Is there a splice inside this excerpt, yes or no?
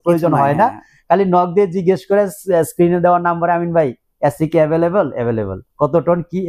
no